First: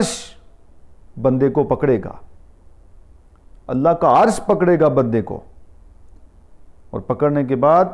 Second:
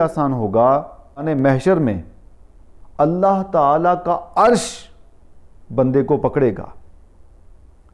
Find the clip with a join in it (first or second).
second